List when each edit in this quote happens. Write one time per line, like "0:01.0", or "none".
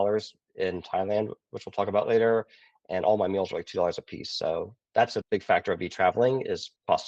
none

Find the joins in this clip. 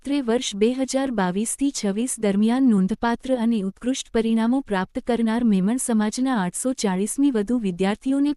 none

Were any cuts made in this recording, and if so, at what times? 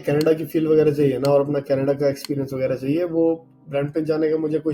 none

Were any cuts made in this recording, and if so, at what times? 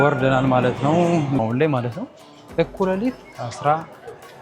0:01.4

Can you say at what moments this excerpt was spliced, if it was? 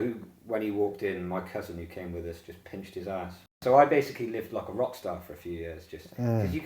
0:03.6

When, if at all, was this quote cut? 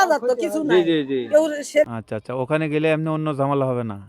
0:01.9

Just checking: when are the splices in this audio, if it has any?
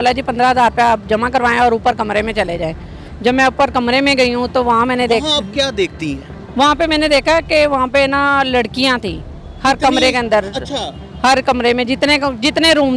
none

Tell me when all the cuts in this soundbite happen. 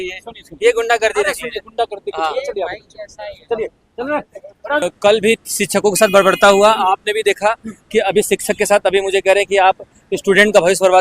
0:04.8

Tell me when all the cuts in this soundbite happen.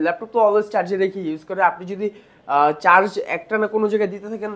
none

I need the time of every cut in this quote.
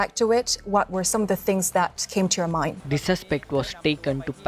0:02.8

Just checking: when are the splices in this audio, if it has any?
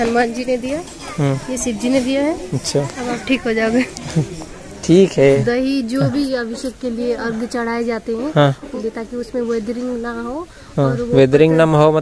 0:05.4
0:08.7

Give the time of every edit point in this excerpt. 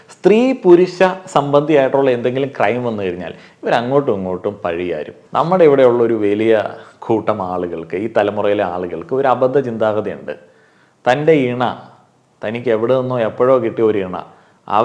0:05.2

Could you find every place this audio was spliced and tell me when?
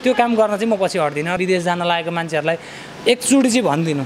0:01.4

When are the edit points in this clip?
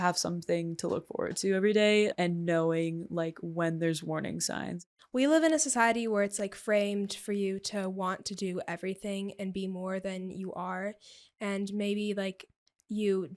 0:02.1
0:04.8

